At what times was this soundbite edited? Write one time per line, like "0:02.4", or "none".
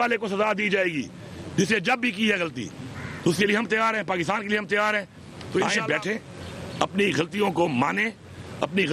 0:05.6